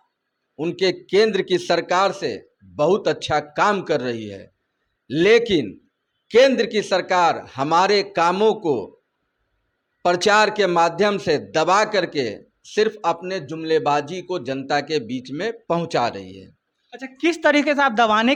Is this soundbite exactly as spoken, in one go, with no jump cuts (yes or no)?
yes